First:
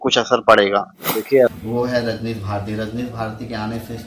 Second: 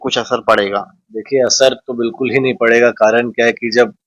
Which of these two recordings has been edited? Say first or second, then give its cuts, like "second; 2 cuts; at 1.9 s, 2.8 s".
first; 1 cut; at 1.5 s